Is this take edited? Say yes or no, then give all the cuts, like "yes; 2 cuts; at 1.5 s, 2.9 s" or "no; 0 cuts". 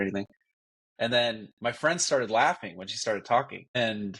no; 0 cuts